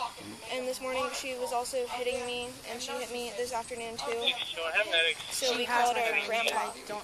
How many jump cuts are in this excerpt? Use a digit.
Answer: 0